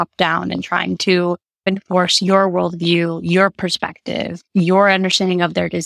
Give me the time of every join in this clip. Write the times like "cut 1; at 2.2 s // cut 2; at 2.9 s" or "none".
cut 1; at 1.6 s

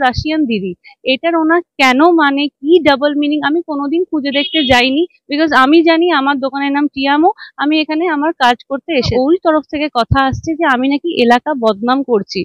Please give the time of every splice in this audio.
cut 1; at 9.1 s

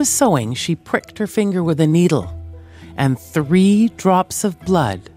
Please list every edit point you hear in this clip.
none

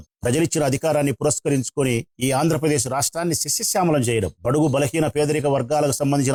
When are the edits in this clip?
none

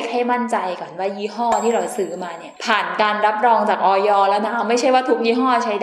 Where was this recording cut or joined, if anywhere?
none

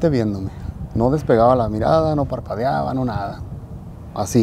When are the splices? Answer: none

